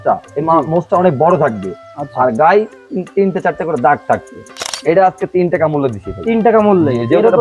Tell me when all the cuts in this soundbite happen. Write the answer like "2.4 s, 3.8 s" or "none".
4.7 s